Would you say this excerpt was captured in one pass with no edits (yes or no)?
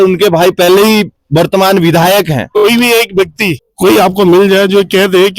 no